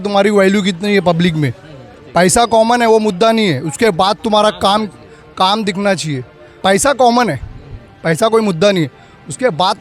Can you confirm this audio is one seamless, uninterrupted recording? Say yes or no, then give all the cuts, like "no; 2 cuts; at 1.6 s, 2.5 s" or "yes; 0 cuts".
no; 2 cuts; at 1.9 s, 6.6 s